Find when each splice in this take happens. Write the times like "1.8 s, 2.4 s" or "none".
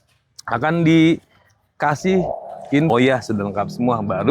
2.9 s